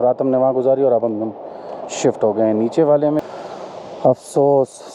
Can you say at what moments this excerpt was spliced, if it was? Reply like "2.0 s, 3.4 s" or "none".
3.2 s